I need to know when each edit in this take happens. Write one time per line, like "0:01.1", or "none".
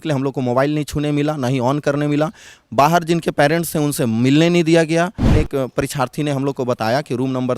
0:05.3